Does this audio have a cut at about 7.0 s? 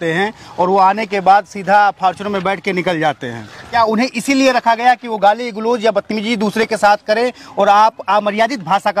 no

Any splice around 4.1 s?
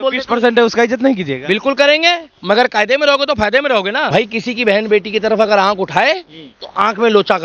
yes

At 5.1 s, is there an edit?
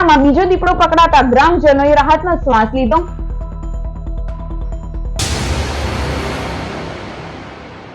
yes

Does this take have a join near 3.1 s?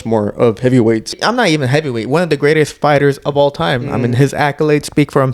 no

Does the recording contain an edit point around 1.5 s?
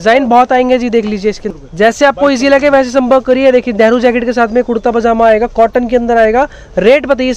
yes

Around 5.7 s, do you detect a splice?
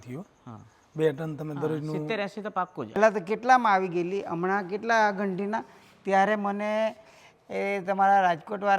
no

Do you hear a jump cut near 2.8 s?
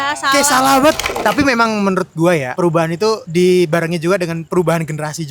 yes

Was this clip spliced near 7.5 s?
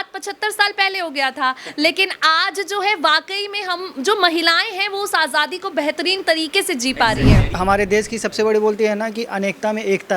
yes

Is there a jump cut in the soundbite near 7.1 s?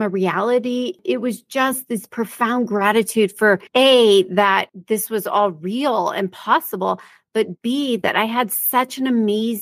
no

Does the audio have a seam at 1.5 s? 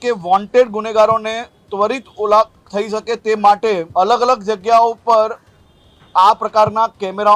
no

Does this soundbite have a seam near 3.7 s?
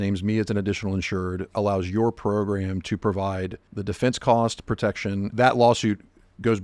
yes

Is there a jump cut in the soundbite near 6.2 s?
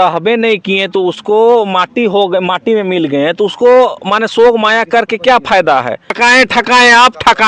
yes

